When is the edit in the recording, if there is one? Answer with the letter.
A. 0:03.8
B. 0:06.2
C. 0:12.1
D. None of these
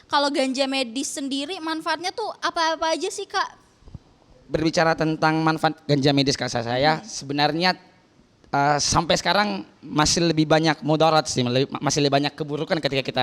D